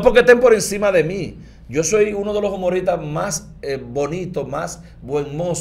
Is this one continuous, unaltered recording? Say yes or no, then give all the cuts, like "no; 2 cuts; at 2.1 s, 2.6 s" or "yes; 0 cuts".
yes; 0 cuts